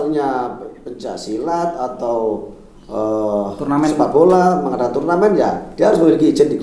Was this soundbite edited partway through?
no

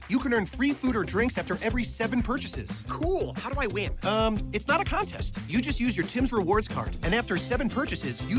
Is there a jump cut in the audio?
no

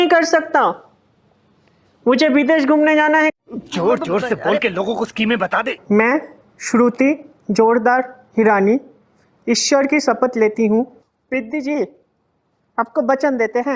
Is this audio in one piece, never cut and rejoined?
no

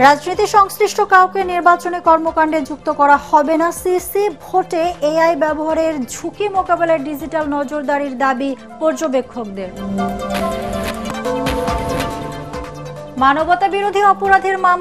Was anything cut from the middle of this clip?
yes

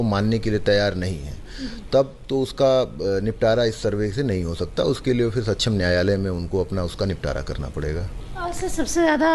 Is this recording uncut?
yes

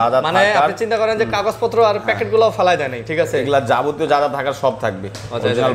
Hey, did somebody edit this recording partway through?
no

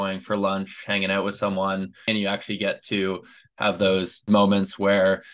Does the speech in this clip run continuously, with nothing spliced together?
no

